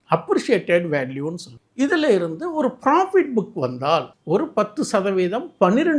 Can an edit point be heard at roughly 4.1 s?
yes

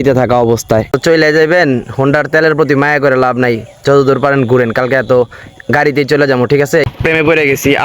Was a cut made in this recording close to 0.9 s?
yes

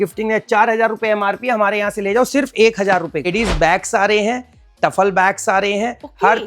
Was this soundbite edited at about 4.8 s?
no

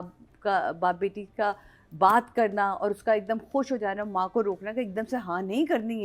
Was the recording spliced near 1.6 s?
no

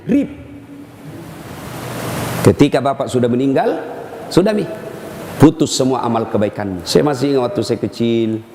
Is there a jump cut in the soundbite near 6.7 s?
yes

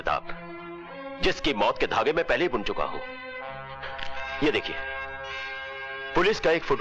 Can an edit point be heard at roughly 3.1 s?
no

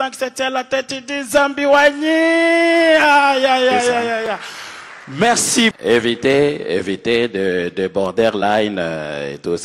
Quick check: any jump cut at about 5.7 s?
yes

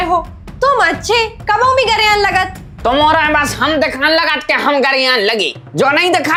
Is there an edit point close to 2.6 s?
no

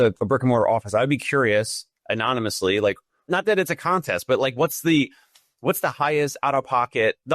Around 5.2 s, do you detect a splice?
no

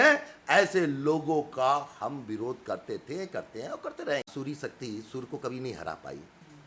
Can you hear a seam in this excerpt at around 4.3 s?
yes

